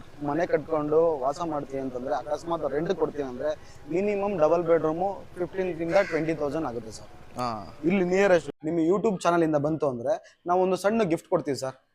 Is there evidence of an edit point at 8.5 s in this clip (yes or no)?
yes